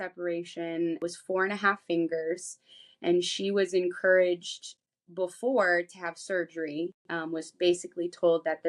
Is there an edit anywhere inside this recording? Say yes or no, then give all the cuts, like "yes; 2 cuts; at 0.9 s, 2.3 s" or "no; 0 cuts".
yes; 1 cut; at 1.1 s